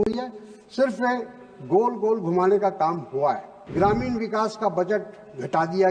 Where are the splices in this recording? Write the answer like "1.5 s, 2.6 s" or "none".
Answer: 3.5 s